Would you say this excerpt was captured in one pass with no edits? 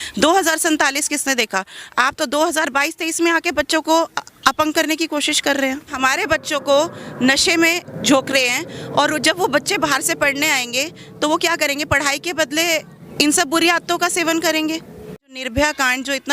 no; 4 cuts; at 5.9 s, 7.9 s, 13.0 s, 15.3 s

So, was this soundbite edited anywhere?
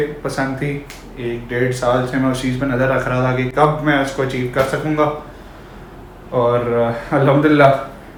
no; 0 cuts

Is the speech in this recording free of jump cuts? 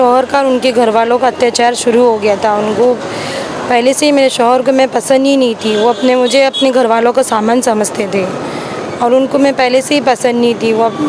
yes; 0 cuts

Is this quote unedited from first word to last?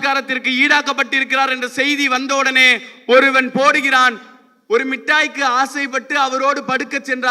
yes; 0 cuts

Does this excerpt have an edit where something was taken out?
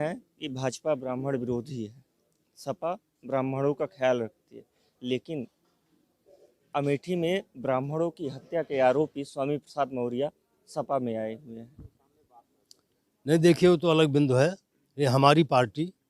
no; 0 cuts

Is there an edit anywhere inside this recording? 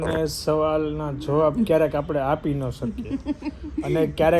no; 0 cuts

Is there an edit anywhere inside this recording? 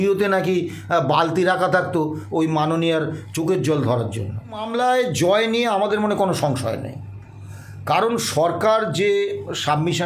yes; 1 cut; at 4.7 s

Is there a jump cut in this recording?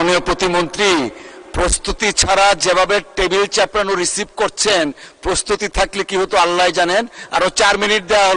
no; 0 cuts

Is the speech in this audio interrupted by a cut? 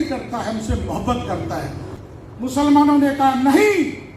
yes; 1 cut; at 1.8 s

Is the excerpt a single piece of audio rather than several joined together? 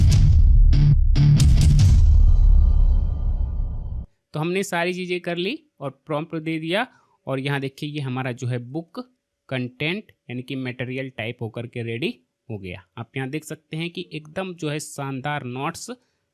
no; 1 cut; at 4.0 s

